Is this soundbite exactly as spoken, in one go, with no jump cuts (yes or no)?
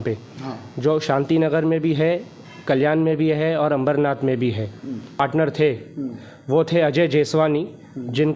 no